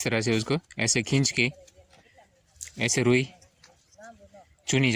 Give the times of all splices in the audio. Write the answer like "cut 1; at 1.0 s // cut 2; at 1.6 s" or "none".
none